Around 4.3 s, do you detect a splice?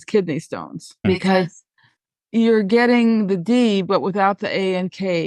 no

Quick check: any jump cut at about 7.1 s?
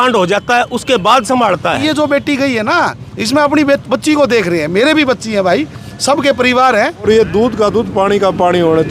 yes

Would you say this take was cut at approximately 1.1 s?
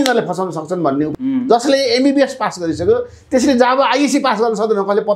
yes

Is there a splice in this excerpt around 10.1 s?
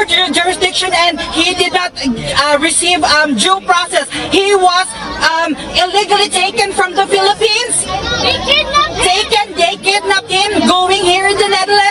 no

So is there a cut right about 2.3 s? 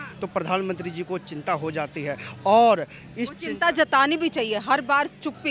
no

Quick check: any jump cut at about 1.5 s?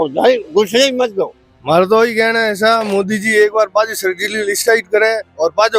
yes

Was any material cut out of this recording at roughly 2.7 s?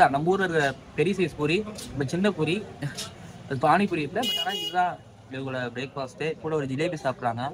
no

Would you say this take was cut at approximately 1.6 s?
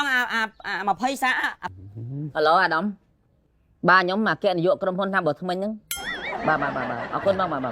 yes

